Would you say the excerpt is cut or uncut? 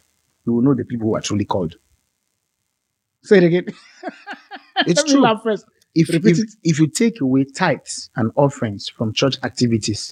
uncut